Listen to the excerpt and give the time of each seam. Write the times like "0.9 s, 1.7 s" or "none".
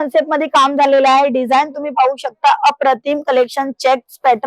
none